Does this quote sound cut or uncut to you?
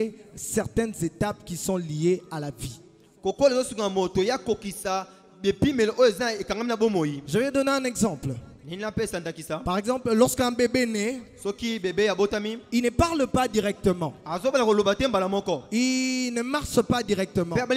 uncut